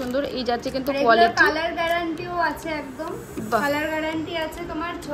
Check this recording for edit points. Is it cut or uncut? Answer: uncut